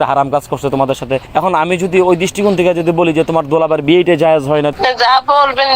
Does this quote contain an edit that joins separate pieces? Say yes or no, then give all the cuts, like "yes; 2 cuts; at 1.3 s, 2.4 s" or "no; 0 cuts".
yes; 2 cuts; at 1.2 s, 4.7 s